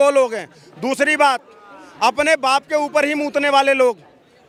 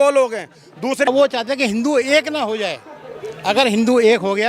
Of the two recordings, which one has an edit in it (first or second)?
second